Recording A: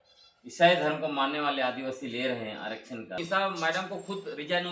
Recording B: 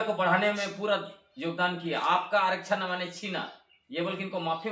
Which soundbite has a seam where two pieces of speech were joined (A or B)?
A